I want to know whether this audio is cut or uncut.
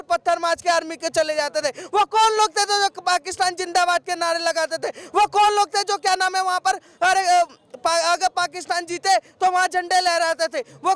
uncut